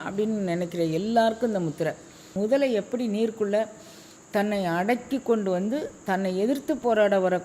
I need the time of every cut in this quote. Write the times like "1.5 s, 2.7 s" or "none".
2.3 s

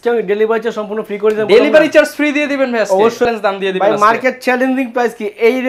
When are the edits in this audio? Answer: 3.3 s

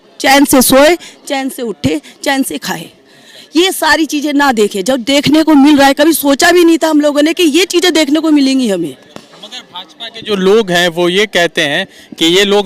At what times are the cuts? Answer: none

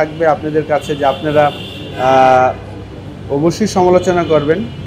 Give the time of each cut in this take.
none

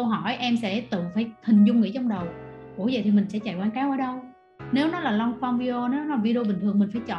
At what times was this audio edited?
none

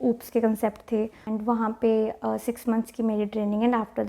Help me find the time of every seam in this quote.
1.2 s

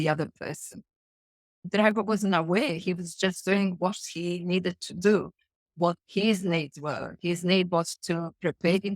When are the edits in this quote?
1.6 s

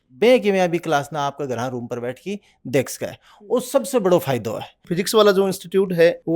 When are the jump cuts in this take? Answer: 4.9 s

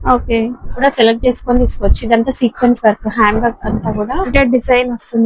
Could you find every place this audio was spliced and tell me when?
0.8 s, 4.3 s

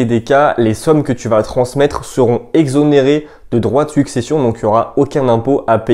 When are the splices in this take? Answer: none

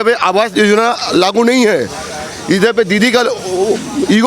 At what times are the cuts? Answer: none

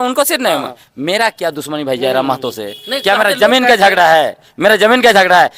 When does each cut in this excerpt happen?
none

